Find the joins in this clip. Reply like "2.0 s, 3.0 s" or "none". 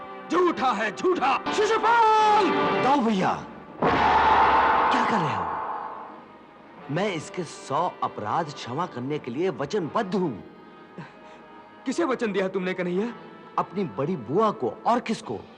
1.5 s